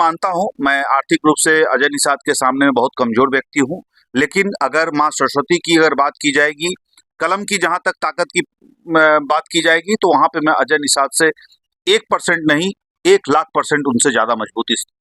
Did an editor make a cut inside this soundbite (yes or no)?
no